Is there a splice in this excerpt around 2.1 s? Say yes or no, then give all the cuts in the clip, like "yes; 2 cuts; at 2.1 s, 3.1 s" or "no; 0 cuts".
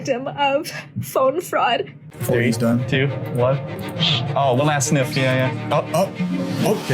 yes; 1 cut; at 2.1 s